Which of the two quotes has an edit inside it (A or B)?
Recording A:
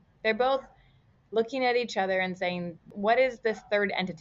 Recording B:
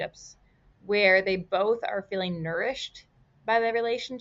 A